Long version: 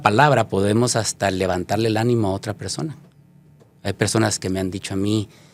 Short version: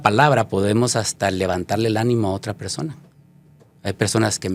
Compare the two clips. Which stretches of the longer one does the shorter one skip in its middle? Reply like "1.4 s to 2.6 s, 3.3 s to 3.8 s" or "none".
none